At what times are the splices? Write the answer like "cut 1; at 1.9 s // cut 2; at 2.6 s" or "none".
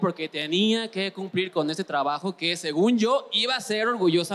none